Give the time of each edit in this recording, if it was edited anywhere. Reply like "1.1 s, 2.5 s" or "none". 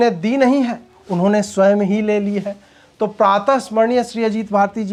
none